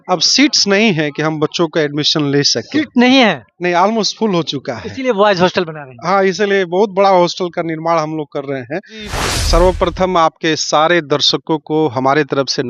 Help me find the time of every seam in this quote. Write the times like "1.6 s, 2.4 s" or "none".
9.2 s

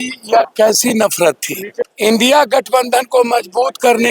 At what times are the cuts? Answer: 1.8 s

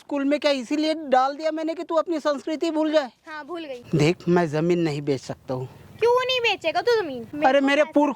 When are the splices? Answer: 3.8 s, 7.2 s

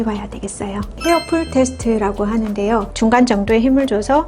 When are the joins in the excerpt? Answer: 0.9 s, 2.9 s

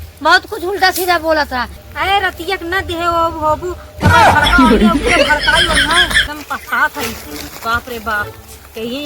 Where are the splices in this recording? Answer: 6.2 s

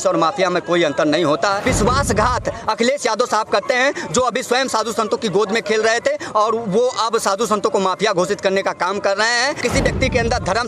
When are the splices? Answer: 1.6 s, 9.6 s

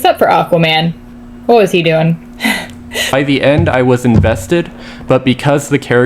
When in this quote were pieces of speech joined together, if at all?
3.1 s

